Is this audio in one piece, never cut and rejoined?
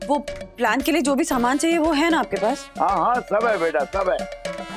yes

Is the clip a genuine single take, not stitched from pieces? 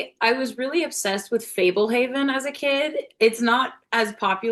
yes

